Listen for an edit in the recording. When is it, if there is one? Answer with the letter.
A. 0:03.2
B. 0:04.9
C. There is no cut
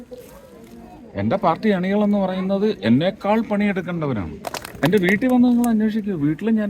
B